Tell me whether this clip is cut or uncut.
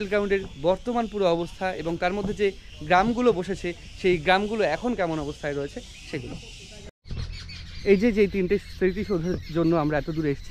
cut